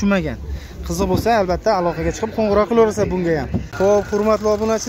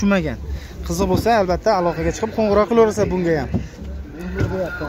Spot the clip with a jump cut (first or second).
first